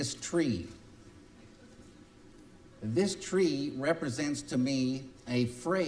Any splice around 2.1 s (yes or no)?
yes